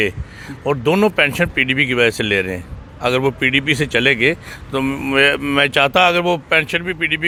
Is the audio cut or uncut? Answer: uncut